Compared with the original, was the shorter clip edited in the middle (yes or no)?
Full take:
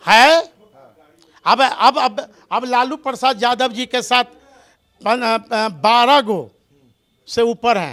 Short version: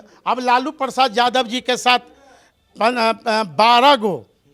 no